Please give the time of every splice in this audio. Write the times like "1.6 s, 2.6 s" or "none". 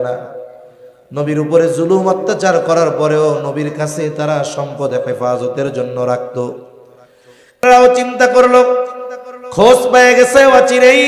7.6 s